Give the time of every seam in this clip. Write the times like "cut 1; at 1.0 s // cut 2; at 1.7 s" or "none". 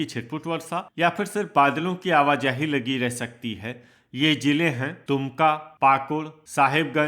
none